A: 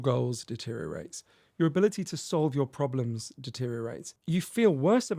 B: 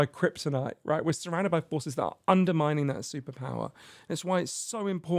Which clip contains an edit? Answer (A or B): A